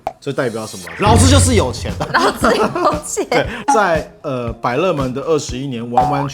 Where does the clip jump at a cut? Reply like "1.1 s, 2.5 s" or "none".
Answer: 3.5 s